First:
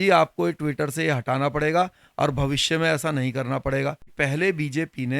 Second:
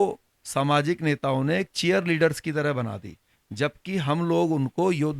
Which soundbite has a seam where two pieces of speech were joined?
first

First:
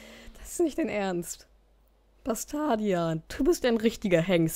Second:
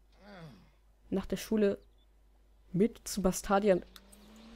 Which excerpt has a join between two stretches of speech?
first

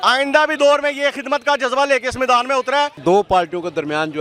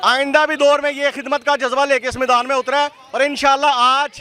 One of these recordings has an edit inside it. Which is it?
first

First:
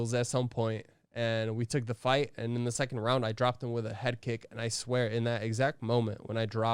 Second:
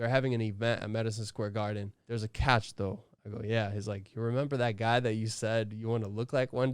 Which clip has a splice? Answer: second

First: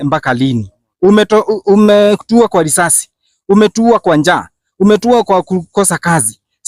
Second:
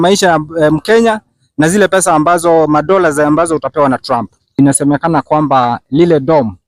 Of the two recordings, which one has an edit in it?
second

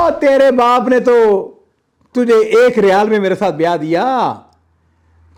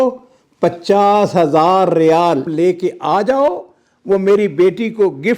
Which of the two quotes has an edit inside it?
second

